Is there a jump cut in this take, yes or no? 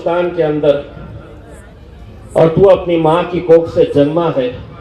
no